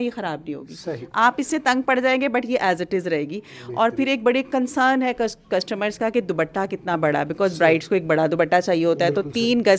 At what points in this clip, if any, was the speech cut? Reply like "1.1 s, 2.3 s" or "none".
none

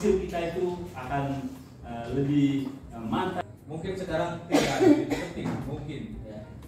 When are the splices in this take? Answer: 3.4 s

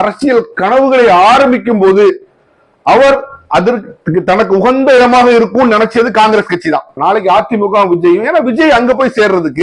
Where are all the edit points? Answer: 6.9 s

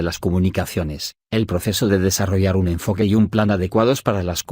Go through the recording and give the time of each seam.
1.6 s

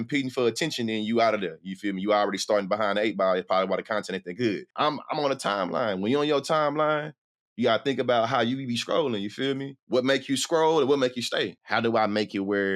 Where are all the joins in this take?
4.7 s, 9.7 s, 11.6 s

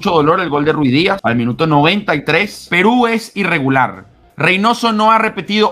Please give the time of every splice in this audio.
1.2 s, 2.6 s

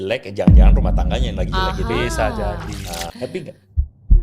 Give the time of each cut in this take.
3.1 s

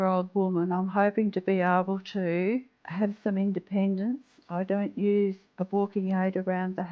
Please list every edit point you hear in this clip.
2.8 s, 5.5 s

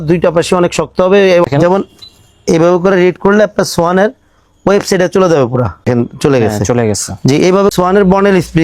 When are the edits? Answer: 1.5 s, 5.9 s, 7.7 s

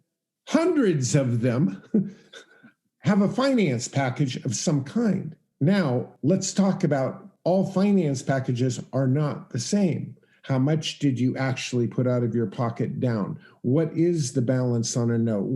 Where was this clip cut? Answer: 5.4 s, 6.1 s, 7.3 s

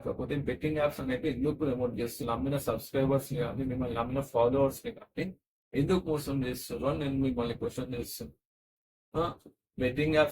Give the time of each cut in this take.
2.2 s

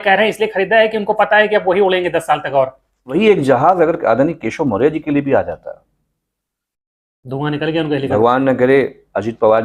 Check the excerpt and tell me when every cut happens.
3.1 s

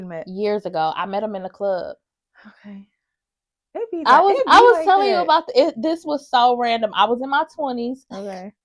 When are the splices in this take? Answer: none

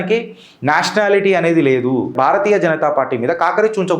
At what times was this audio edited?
2.1 s

